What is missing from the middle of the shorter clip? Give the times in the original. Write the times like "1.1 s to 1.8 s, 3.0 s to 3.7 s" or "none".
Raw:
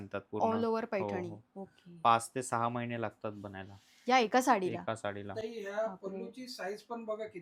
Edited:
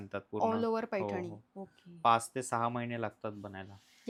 none